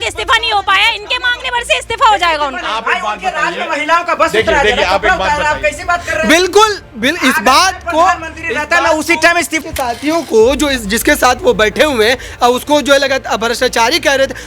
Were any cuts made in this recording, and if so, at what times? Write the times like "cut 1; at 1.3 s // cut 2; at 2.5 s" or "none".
cut 1; at 9.6 s